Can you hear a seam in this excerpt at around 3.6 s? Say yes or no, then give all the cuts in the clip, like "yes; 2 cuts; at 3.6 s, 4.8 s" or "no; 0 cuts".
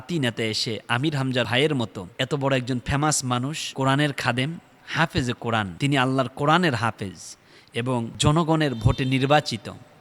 yes; 5 cuts; at 1.5 s, 2.0 s, 3.6 s, 5.7 s, 8.1 s